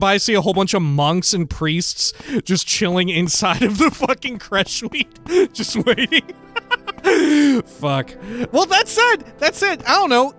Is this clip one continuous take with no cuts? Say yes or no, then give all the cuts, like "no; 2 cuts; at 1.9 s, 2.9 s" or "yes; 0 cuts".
yes; 0 cuts